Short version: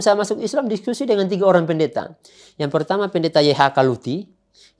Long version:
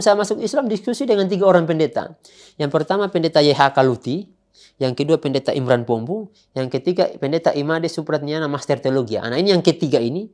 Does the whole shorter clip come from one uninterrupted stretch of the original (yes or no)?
yes